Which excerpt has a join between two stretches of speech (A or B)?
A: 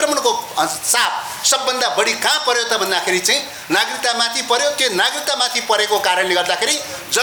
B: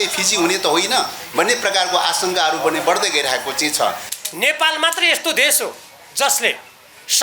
B